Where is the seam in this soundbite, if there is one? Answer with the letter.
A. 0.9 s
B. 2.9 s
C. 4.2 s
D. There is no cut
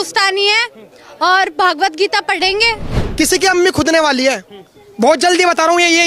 B